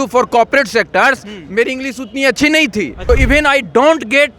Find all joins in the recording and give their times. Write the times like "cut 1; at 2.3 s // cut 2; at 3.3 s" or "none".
cut 1; at 3.0 s